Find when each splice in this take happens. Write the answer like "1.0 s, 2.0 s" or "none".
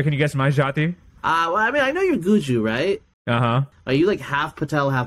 1.1 s, 3.5 s

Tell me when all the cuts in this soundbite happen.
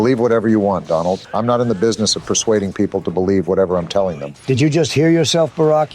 1.3 s, 4.3 s

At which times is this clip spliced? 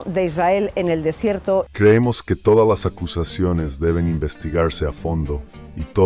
1.7 s

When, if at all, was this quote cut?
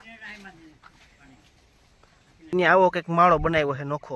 2.5 s

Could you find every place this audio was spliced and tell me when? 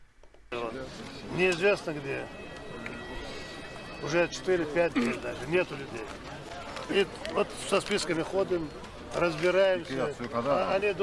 none

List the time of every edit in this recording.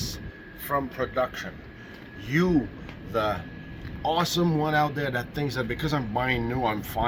none

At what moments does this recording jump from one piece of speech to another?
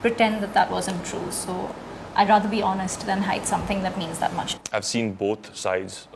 4.5 s

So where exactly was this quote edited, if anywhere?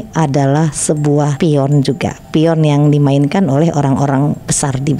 1.3 s

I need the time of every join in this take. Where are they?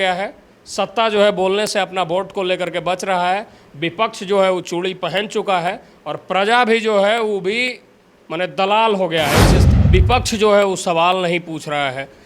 9.7 s

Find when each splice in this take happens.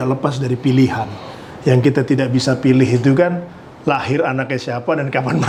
none

